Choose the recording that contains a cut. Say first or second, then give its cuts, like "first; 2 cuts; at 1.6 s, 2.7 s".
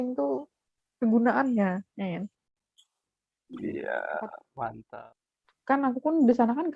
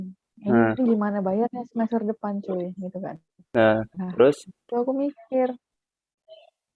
first; 1 cut; at 4.9 s